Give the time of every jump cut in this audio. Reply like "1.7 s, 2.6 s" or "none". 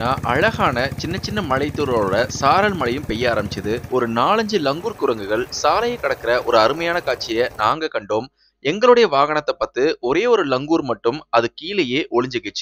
3.8 s